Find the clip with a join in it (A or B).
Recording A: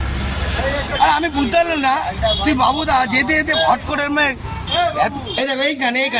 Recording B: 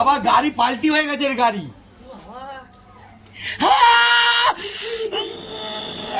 A